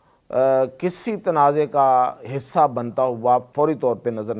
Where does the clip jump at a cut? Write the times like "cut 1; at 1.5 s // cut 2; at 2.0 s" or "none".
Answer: cut 1; at 3.5 s